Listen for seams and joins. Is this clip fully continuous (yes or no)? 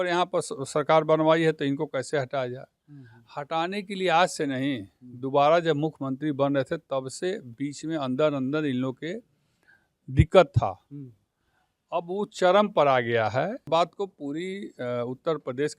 no